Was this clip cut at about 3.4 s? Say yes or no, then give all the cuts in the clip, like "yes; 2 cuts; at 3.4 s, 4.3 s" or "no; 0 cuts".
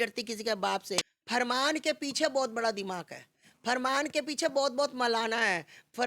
no; 1 cut; at 1.1 s